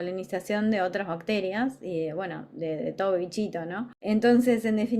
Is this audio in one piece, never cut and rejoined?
no; 1 cut; at 3.9 s

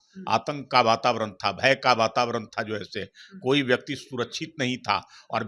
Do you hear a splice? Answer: no; 0 cuts

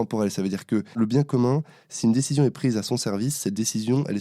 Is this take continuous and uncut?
no; 1 cut; at 1.0 s

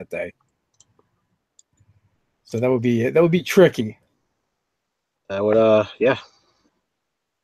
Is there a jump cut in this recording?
no; 0 cuts

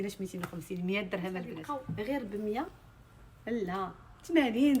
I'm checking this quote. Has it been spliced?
yes; 1 cut; at 1.5 s

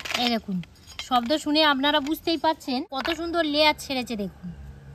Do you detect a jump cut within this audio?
yes; 1 cut; at 2.9 s

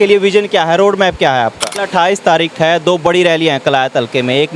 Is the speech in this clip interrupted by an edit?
yes; 1 cut; at 1.7 s

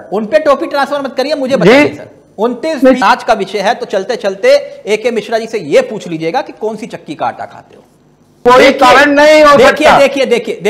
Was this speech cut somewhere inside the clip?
yes; 2 cuts; at 3.0 s, 8.4 s

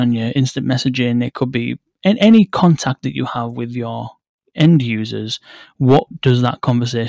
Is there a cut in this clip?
no; 0 cuts

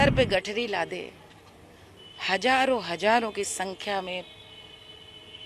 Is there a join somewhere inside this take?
no; 0 cuts

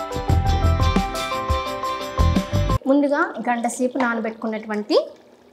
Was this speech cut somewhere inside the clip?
yes; 1 cut; at 2.8 s

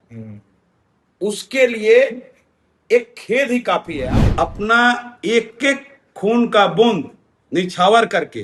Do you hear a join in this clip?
yes; 1 cut; at 4.0 s

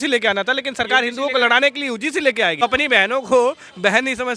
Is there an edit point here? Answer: yes; 1 cut; at 2.6 s

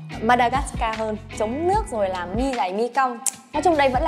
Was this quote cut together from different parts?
yes; 1 cut; at 1.3 s

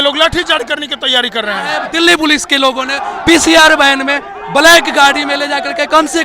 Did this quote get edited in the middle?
yes; 1 cut; at 1.8 s

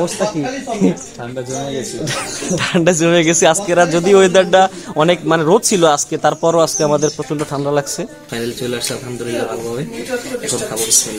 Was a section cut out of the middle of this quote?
yes; 1 cut; at 8.2 s

